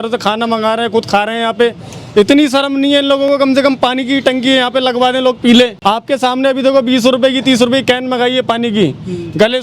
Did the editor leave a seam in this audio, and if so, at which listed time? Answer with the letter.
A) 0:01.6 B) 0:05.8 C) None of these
B